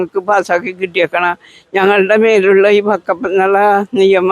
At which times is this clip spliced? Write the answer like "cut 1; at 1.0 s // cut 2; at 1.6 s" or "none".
none

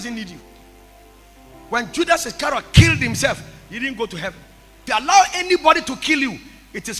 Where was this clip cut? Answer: cut 1; at 4.8 s

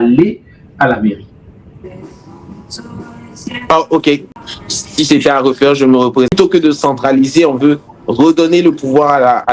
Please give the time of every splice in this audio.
cut 1; at 4.2 s // cut 2; at 6.3 s

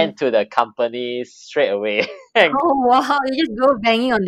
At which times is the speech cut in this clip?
cut 1; at 2.5 s

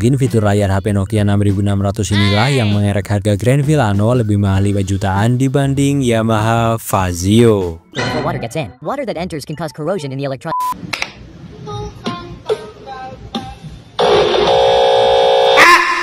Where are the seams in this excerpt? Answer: cut 1; at 8.0 s // cut 2; at 10.6 s

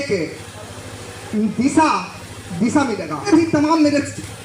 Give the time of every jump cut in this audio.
cut 1; at 3.3 s

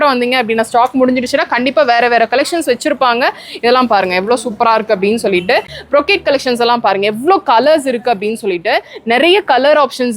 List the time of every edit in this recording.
cut 1; at 5.7 s

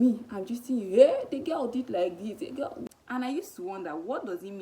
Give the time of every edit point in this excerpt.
cut 1; at 2.9 s

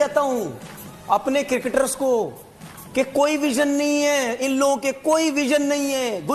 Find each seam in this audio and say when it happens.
none

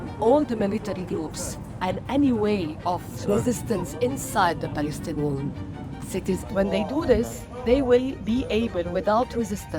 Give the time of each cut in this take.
cut 1; at 3.2 s // cut 2; at 6.4 s

